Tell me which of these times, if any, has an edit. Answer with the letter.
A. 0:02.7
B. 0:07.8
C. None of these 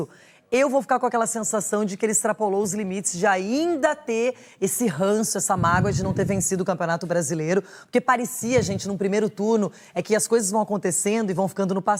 C